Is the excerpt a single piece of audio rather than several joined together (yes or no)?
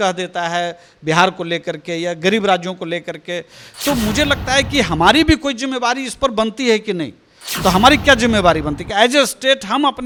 yes